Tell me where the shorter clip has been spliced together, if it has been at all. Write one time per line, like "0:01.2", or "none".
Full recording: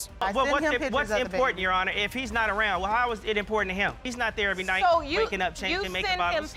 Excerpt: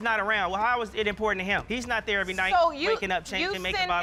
none

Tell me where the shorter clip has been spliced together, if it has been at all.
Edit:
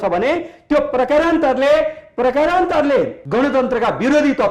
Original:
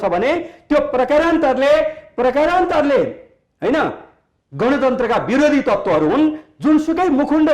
0:03.2

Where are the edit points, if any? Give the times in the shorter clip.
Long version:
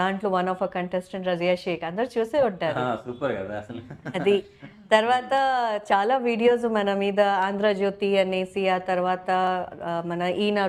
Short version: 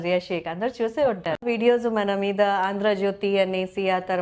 0:01.4

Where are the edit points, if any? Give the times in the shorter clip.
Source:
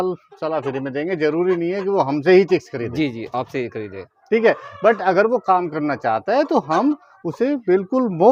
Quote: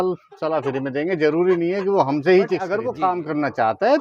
0:02.8

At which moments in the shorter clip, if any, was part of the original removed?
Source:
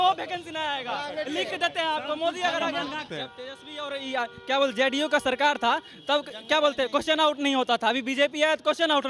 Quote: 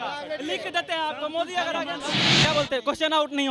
0:02.3

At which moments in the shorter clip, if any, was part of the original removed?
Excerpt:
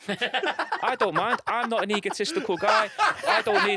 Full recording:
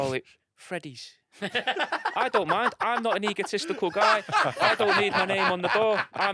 none

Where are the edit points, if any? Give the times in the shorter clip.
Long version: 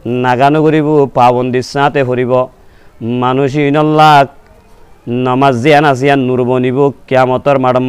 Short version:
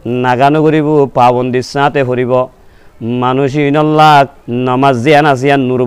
0:04.4

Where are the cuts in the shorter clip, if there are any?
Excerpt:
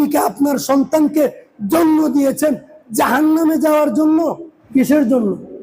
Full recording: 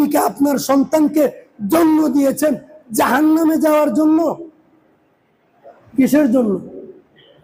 0:04.5

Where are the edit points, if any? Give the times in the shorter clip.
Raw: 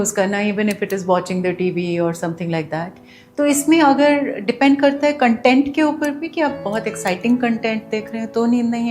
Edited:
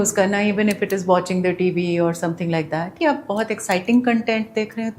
0:02.9

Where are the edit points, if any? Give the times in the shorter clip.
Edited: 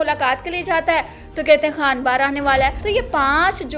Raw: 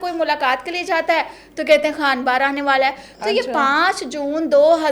0:02.8

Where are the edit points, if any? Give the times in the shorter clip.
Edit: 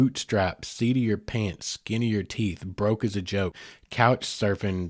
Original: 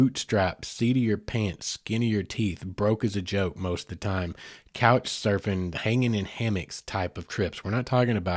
0:03.6

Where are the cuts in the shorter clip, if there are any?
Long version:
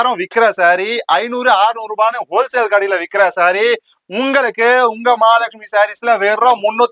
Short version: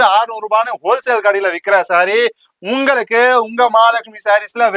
none

